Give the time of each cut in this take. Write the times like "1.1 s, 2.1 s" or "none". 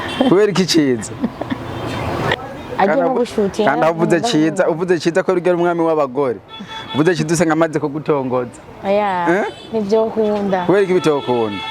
2.4 s